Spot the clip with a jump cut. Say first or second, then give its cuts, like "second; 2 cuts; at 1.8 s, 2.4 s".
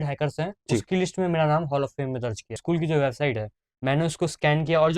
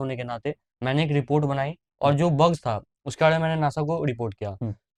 first; 1 cut; at 2.6 s